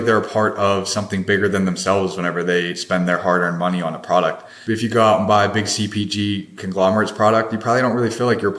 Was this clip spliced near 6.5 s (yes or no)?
no